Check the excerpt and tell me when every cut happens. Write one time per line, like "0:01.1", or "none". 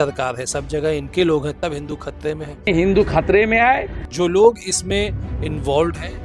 0:04.1

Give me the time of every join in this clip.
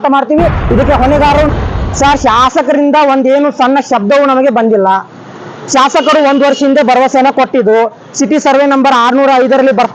0:01.5

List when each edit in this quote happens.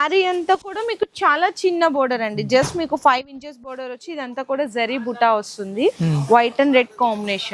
none

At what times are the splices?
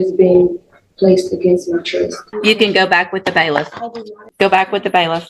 0:02.2
0:04.2

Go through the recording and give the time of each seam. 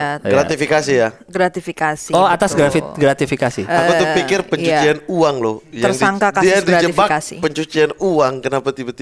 none

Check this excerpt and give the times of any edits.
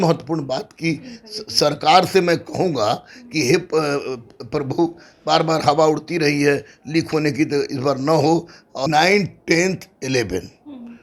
0:08.9

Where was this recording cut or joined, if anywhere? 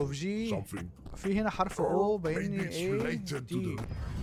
none

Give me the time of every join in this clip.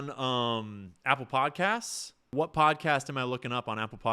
0:02.3

